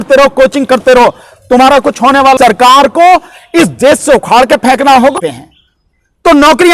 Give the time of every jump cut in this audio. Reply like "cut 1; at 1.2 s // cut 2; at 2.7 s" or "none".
cut 1; at 2.4 s // cut 2; at 5.1 s